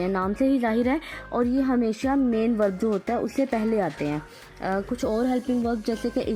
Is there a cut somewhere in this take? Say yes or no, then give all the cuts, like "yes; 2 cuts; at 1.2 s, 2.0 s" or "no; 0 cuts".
no; 0 cuts